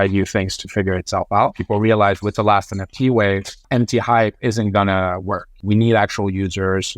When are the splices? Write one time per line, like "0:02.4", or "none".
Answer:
0:01.6
0:03.6
0:05.6